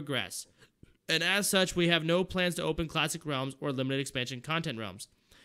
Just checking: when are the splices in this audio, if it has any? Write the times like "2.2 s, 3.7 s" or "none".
4.3 s